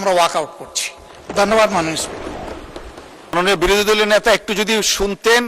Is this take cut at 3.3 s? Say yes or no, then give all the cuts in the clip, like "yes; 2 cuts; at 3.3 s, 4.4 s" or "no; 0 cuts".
yes; 1 cut; at 3.3 s